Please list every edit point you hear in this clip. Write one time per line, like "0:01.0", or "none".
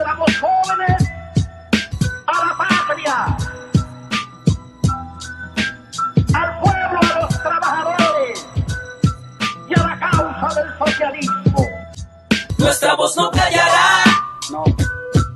0:06.6